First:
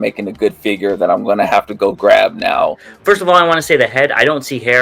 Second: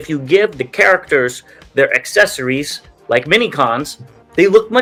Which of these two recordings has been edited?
first; 1 cut; at 2.9 s

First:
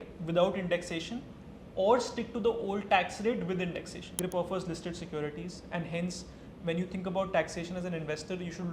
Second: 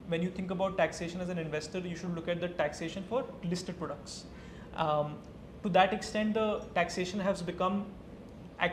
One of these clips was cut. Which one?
first; 1 cut; at 4.1 s

